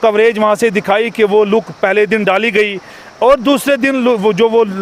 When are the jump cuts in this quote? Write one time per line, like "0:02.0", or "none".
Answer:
none

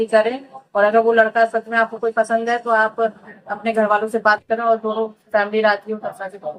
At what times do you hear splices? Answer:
none

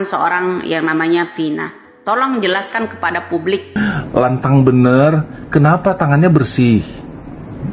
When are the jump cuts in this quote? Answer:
0:03.8

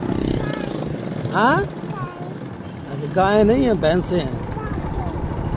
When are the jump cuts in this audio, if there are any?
none

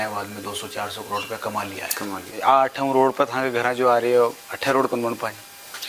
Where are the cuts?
0:02.3

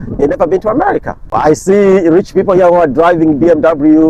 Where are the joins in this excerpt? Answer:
0:01.3

